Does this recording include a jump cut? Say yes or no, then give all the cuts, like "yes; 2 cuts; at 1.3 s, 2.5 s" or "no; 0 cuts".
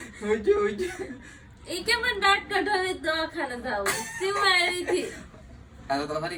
no; 0 cuts